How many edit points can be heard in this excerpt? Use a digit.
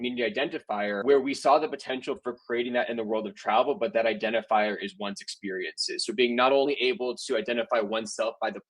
1